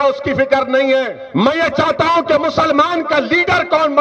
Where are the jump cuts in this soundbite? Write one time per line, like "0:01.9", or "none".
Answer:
0:01.2